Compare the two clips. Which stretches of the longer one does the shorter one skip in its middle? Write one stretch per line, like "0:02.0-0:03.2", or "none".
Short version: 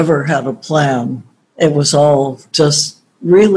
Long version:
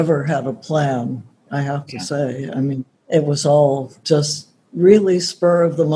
0:01.4-0:02.9

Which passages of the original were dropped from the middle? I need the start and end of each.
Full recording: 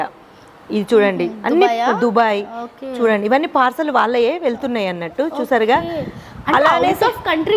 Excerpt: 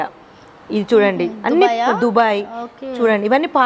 none

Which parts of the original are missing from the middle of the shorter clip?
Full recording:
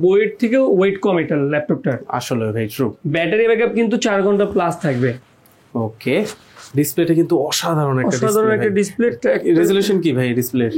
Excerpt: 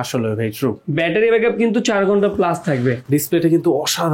0:05.2-0:06.7

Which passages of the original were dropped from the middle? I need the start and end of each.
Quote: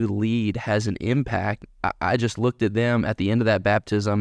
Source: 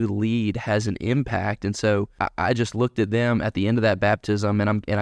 0:01.7-0:02.1

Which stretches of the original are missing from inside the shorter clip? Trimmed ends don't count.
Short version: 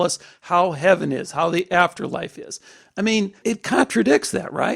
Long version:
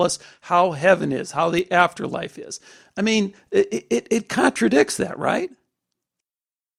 0:03.4-0:04.0

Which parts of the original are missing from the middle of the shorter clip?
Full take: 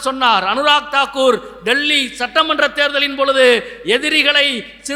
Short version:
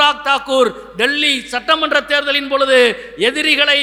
none

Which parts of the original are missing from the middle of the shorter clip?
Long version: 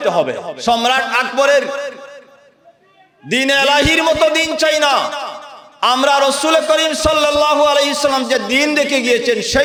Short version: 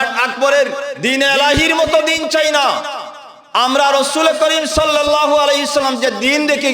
0:01.9-0:03.2

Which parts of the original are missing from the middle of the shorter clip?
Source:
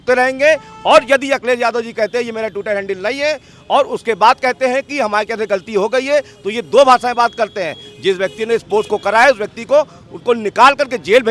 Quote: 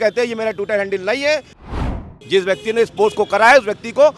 0:03.7-0:07.5

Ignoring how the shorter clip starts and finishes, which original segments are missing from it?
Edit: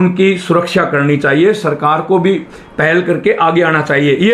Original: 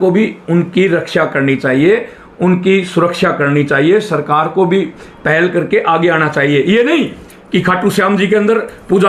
none

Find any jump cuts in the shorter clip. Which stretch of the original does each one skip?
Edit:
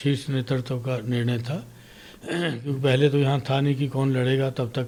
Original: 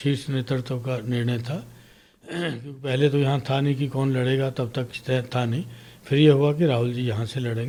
none

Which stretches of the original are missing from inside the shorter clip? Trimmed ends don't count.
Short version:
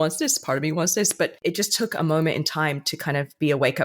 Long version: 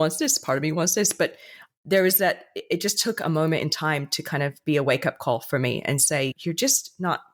0:01.4-0:02.6

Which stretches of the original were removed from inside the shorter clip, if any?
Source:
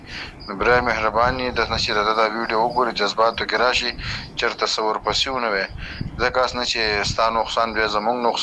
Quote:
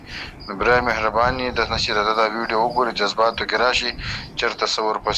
none

